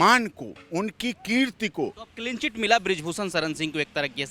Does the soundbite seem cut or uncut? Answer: cut